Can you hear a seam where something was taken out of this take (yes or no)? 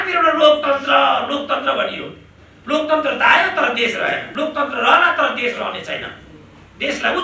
yes